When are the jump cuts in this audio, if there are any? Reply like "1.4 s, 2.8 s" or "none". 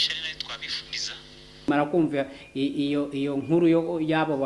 1.7 s